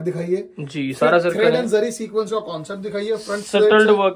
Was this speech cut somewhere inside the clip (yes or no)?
no